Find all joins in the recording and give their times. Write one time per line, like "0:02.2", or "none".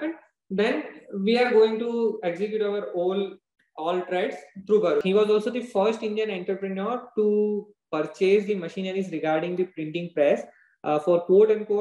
0:05.0